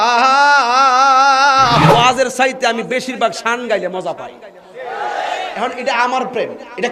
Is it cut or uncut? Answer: cut